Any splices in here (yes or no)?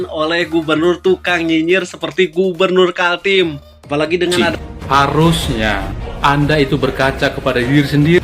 yes